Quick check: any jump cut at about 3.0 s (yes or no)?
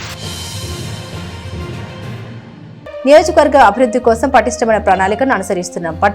yes